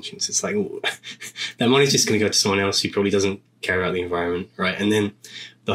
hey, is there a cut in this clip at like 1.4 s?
no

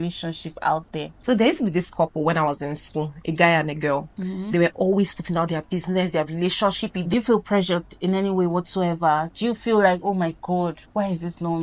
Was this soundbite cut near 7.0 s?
yes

